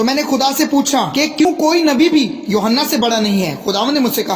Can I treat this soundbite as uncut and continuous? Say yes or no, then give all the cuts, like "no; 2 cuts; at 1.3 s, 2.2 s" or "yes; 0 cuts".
no; 1 cut; at 1.4 s